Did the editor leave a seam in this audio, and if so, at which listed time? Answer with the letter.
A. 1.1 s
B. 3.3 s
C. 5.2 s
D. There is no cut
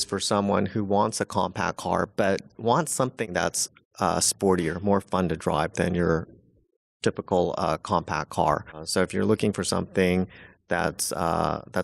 B